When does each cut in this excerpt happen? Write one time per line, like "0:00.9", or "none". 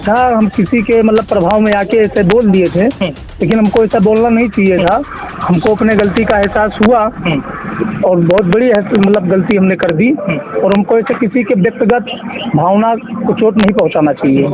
none